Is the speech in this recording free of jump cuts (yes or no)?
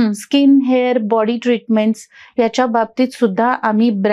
yes